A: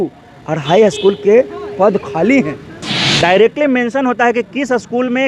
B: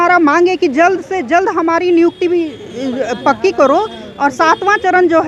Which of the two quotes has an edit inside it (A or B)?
A